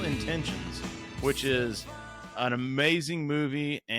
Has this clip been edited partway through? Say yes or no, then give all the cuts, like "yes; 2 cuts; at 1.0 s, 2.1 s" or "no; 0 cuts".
no; 0 cuts